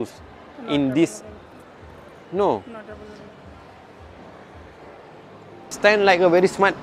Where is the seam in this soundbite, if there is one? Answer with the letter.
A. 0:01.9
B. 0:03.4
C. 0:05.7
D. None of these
C